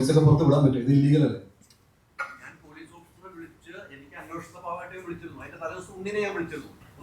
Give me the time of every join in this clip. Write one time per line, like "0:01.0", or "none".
none